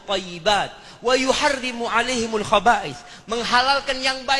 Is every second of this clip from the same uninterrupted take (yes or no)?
yes